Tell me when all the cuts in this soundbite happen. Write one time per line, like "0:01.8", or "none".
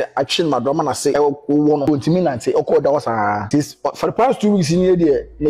0:01.1
0:01.8
0:03.4